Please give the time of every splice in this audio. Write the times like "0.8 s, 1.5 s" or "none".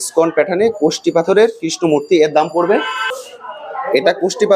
3.1 s